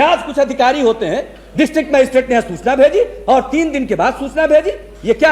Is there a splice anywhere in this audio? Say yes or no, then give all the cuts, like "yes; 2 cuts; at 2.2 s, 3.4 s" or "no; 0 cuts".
no; 0 cuts